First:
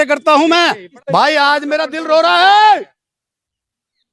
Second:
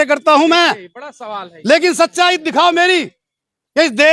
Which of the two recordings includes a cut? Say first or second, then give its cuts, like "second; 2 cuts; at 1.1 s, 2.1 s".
first; 1 cut; at 0.9 s